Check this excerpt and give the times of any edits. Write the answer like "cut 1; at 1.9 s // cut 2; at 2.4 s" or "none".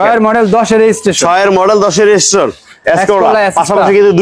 cut 1; at 2.8 s